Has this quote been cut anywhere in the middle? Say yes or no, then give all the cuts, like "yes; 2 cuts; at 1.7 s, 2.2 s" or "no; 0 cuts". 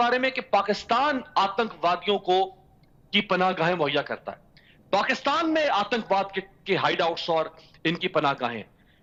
no; 0 cuts